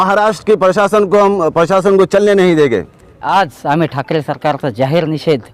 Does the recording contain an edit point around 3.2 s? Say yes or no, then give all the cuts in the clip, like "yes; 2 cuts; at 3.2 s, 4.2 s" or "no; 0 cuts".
yes; 1 cut; at 3.2 s